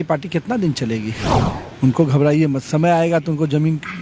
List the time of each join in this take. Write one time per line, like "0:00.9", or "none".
0:01.4